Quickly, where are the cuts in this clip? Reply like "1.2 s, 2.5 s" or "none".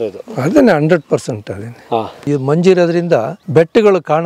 2.2 s, 3.4 s